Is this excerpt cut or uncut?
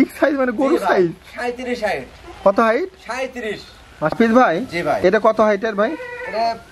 cut